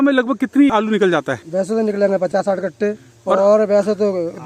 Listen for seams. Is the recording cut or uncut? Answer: cut